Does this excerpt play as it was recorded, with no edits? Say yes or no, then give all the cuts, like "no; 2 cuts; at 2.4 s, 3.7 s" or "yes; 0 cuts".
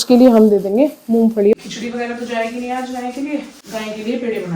no; 2 cuts; at 1.5 s, 3.6 s